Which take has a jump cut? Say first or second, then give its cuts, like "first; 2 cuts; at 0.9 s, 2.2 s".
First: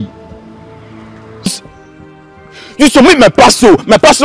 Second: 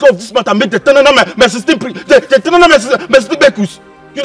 first; 1 cut; at 1.5 s